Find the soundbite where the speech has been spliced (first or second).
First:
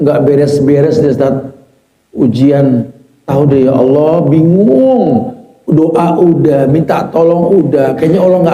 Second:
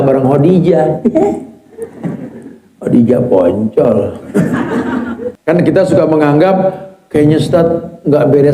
second